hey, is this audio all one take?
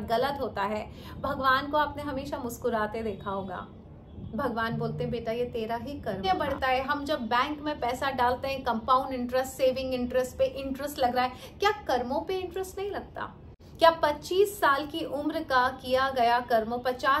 no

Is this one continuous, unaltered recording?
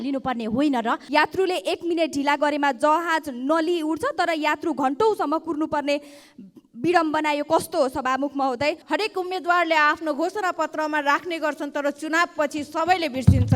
no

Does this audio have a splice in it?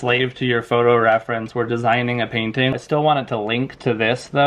yes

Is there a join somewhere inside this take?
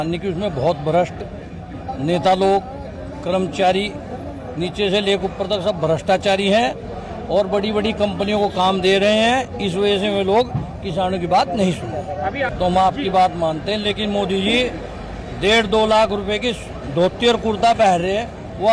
no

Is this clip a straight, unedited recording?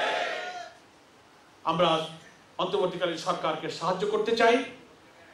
yes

